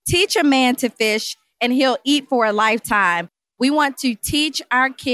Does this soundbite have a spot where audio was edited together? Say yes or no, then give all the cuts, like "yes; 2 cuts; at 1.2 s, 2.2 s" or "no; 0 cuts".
yes; 1 cut; at 3.4 s